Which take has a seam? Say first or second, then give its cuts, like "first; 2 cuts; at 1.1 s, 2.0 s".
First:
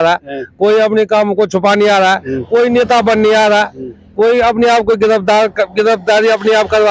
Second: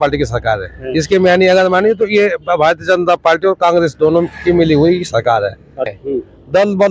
second; 1 cut; at 6.0 s